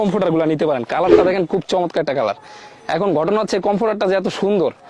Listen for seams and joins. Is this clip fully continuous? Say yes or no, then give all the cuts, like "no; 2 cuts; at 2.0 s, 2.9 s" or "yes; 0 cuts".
yes; 0 cuts